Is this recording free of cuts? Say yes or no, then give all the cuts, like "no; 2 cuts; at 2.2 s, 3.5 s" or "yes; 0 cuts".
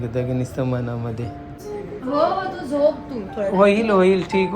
no; 1 cut; at 1.6 s